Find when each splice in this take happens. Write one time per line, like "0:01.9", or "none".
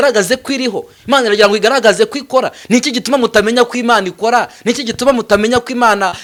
none